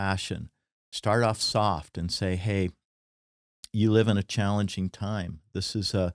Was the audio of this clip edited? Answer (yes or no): no